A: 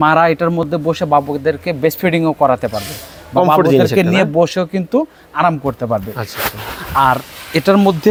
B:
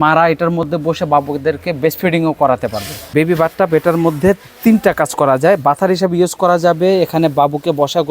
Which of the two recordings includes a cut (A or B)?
B